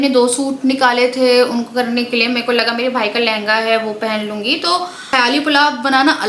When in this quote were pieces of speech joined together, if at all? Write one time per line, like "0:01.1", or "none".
0:05.1